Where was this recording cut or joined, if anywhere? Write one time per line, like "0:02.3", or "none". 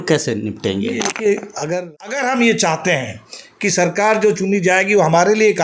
0:01.6